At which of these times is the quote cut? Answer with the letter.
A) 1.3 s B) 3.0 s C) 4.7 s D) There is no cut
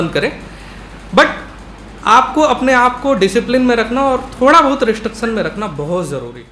D